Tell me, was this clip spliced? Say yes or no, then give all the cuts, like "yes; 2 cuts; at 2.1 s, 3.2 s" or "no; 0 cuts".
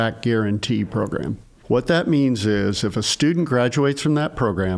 yes; 1 cut; at 1.5 s